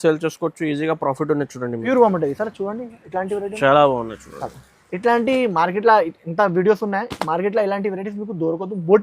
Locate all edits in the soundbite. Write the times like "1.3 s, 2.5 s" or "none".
1.8 s